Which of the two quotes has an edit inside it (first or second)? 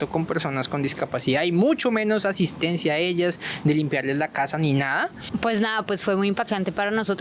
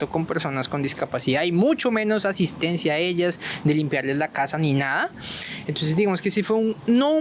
first